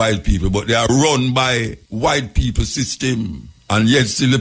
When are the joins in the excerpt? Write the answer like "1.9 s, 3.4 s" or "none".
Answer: 1.8 s, 3.5 s

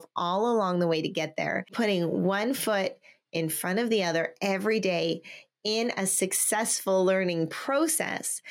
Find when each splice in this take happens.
1.7 s

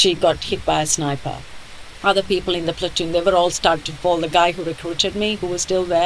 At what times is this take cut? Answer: 1.9 s

